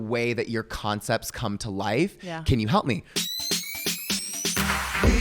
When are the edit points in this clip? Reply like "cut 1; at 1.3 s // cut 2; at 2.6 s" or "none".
cut 1; at 3.1 s